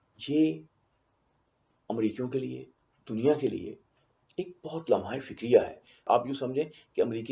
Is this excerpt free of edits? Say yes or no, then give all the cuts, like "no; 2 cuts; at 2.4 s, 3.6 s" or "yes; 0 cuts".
no; 1 cut; at 6.1 s